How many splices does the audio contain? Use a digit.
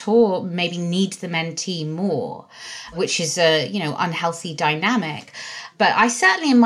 2